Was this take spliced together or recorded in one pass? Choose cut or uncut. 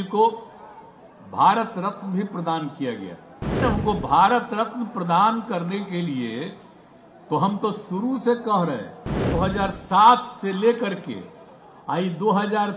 cut